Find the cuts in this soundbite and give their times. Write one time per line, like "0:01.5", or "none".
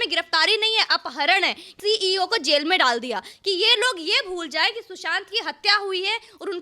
0:01.7

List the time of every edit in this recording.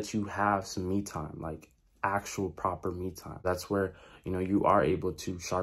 0:03.4

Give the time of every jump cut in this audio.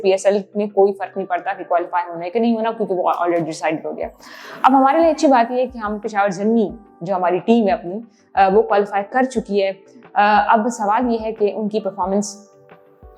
none

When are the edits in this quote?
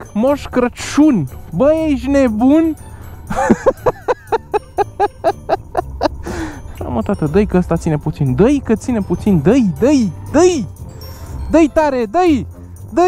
0:06.7

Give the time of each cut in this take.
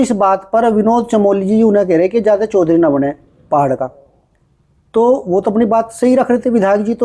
none

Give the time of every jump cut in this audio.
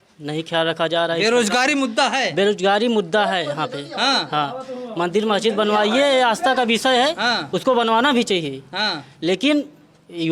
none

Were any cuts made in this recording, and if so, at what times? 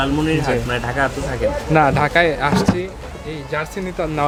none

